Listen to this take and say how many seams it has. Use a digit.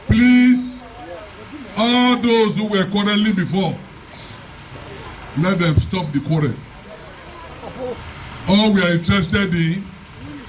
0